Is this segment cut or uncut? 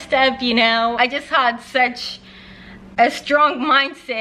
cut